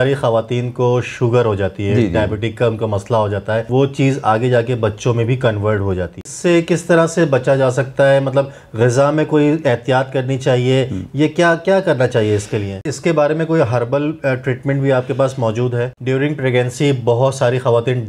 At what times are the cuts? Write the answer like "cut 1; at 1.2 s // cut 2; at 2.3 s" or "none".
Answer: cut 1; at 3.7 s // cut 2; at 6.2 s // cut 3; at 12.9 s // cut 4; at 15.9 s